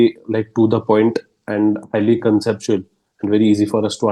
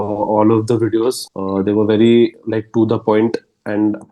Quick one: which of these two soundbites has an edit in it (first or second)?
second